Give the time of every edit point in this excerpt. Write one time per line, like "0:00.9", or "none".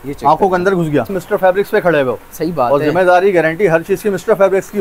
0:01.2